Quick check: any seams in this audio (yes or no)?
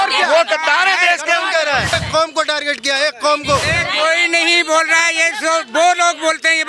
yes